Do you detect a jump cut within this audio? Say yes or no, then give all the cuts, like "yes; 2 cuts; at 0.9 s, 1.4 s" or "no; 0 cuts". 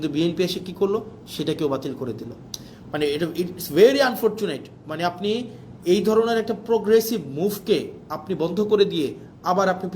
no; 0 cuts